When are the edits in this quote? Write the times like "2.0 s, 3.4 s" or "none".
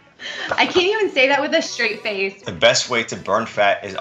2.4 s